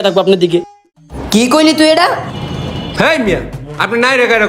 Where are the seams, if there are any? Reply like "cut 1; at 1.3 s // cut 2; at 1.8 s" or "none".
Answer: cut 1; at 2.8 s